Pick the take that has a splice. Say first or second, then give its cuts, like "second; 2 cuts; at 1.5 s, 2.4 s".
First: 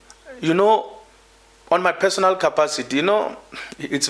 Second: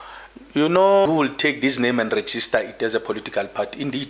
second; 1 cut; at 1.1 s